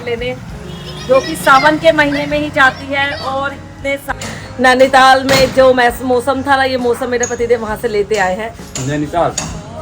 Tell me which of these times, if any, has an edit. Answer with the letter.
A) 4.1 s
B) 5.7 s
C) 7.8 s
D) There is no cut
A